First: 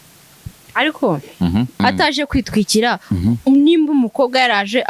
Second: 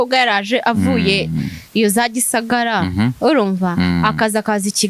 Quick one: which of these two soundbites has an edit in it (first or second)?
first